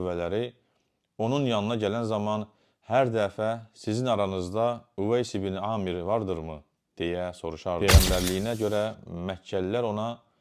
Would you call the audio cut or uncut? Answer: cut